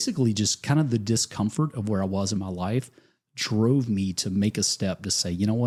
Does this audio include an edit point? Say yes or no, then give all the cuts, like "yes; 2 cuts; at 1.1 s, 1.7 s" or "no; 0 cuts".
no; 0 cuts